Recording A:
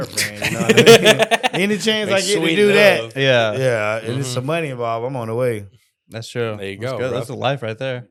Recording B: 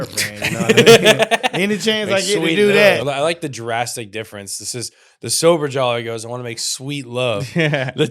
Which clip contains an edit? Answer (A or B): B